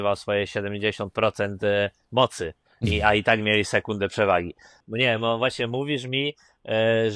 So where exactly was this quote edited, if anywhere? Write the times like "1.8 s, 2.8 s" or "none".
4.7 s